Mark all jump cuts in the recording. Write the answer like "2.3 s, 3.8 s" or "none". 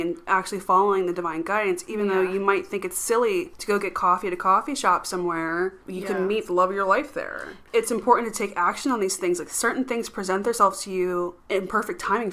3.5 s, 5.8 s, 7.6 s, 11.4 s